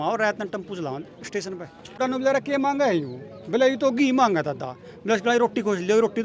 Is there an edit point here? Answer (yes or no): yes